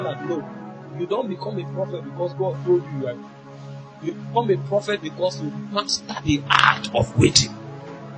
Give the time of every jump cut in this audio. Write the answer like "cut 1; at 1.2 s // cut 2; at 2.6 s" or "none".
none